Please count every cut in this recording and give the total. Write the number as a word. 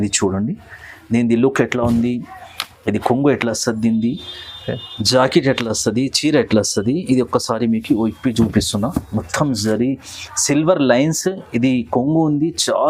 zero